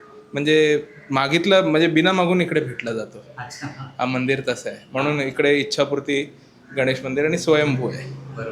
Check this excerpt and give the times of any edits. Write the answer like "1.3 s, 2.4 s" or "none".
none